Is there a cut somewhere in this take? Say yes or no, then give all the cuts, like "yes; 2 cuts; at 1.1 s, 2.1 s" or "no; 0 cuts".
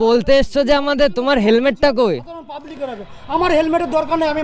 no; 0 cuts